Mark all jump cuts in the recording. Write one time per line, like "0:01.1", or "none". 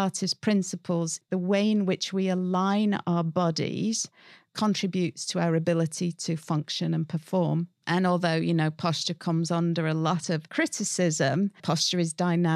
0:01.2
0:07.8
0:10.5
0:11.6

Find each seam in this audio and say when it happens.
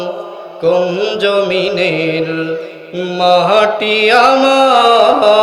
none

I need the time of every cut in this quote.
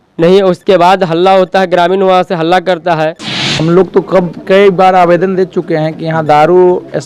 0:03.6

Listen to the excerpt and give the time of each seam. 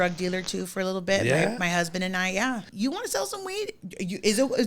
0:02.7

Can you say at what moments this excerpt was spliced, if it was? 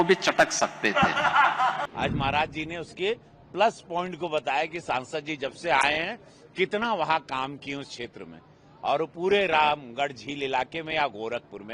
0:01.9

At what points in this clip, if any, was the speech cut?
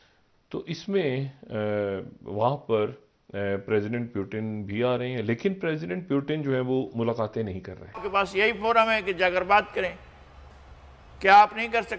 0:08.0

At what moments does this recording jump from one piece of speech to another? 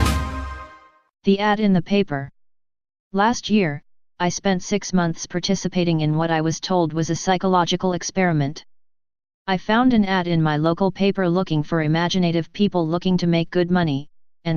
0:04.5

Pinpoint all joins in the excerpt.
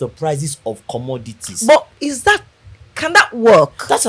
none

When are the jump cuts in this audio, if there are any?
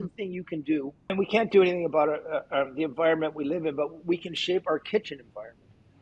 0:01.1

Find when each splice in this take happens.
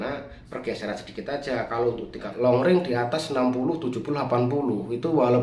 0:02.3

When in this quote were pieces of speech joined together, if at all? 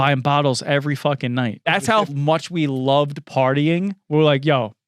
0:02.1

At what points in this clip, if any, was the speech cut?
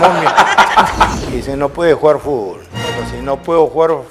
0:01.1
0:02.6

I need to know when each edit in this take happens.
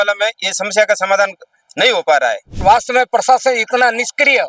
0:02.6

